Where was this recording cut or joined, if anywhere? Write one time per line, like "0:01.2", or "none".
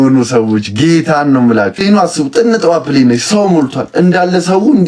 0:01.8